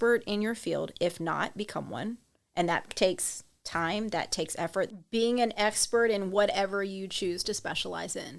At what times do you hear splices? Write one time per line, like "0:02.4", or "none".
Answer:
0:04.9